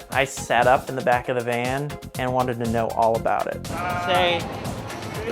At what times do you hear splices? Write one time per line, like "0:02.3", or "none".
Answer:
0:03.7